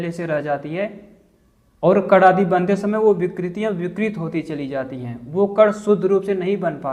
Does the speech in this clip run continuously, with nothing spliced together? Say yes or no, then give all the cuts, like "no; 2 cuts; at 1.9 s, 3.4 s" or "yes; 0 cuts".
yes; 0 cuts